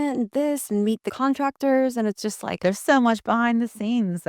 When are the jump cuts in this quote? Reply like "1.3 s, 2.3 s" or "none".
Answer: 1.1 s, 2.6 s

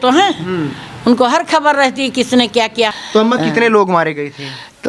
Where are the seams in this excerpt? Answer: 2.9 s

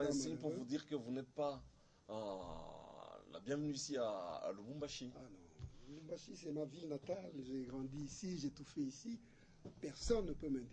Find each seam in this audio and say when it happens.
none

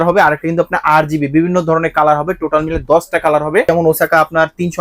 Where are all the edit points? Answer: 3.7 s

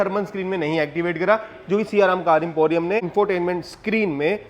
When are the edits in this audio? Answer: 3.1 s

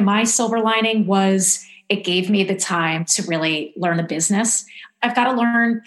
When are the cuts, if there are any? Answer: 4.9 s

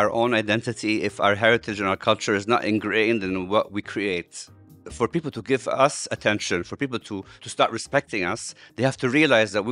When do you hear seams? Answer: 4.6 s, 7.4 s

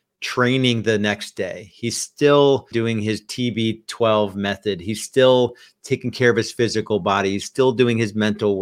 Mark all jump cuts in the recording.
2.7 s

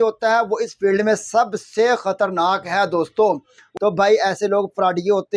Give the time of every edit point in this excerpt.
3.6 s

